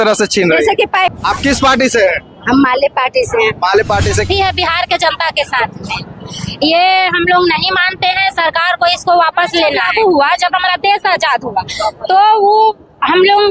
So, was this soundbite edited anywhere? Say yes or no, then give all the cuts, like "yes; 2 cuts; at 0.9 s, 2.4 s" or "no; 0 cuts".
yes; 3 cuts; at 1.1 s, 4.3 s, 9.8 s